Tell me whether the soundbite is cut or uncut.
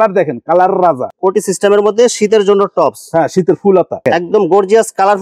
cut